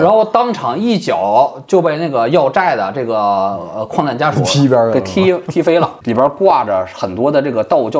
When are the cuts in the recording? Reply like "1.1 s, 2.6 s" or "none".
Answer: 6.0 s